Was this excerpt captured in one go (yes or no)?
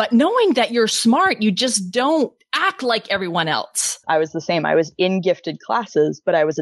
no